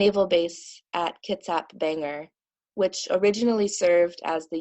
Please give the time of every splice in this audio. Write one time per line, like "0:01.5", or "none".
none